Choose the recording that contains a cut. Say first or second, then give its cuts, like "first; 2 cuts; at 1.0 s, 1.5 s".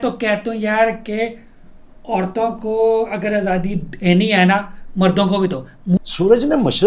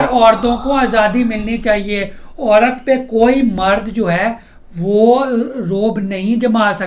first; 1 cut; at 6.0 s